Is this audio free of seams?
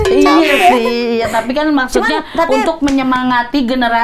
yes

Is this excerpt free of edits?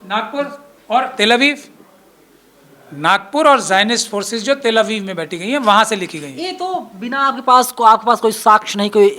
yes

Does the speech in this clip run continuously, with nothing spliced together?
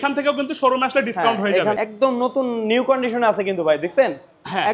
no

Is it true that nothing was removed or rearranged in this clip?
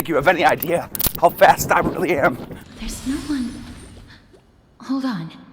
yes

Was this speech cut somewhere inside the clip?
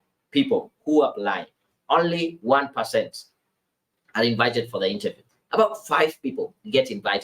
yes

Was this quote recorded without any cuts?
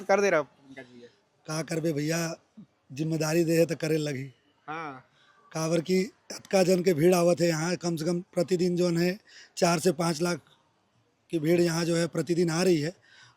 yes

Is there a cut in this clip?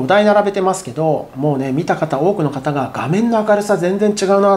no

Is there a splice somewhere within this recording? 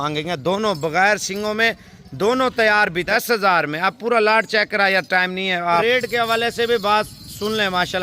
yes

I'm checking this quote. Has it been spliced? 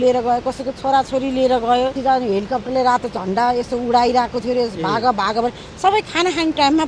yes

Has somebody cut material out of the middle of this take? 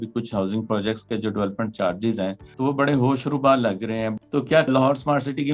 yes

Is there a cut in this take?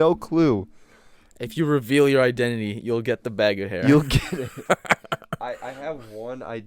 no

